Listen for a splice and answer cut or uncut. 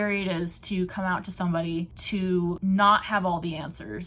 cut